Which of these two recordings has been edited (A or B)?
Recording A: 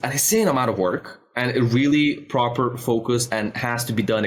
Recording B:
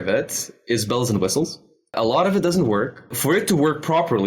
B